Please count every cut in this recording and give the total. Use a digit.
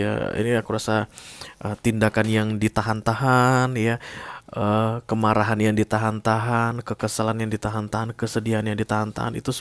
0